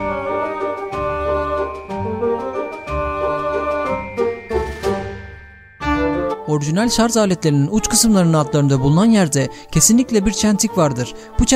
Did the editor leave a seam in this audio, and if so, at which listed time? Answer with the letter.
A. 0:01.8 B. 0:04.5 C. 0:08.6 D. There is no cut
D